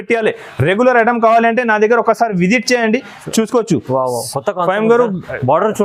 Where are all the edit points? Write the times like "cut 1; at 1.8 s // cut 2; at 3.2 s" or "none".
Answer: none